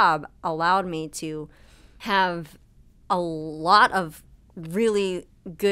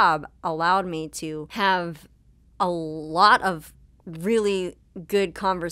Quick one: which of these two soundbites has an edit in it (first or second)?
second